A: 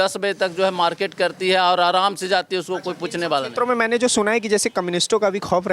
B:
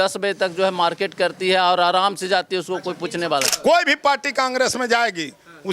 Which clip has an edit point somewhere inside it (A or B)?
B